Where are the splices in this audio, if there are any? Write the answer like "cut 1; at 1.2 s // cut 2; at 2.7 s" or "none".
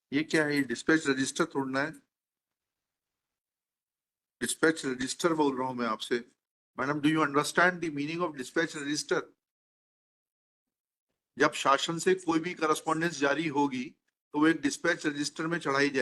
none